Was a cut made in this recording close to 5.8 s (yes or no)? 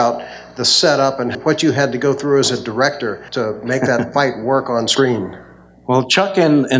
no